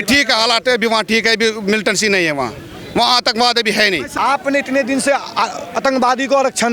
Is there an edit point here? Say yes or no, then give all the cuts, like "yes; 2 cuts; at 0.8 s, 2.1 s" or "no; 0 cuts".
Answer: yes; 1 cut; at 4.1 s